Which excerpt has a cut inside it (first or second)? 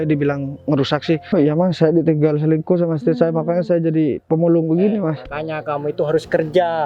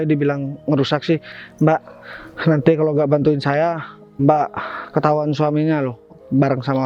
first